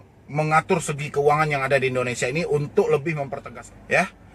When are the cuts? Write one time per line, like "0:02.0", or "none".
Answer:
none

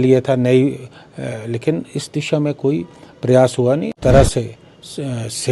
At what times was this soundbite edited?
0:03.9

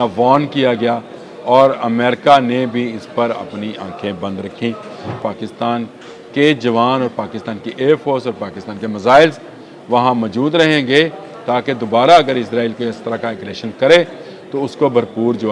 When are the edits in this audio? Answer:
0:05.2

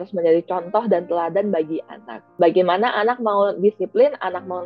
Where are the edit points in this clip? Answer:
0:02.2

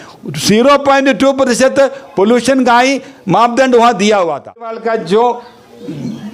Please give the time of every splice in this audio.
0:04.7

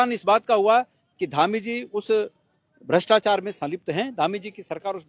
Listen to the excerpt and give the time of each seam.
none

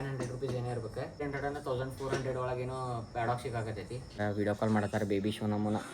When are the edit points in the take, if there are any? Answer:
0:01.2
0:04.2

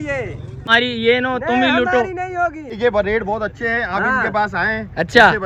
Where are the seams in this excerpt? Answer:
0:00.7
0:02.8

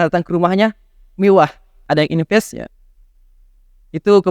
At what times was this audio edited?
0:01.7

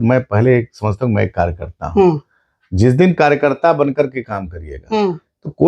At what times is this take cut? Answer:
none

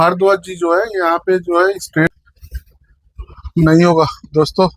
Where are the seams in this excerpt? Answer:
0:02.1

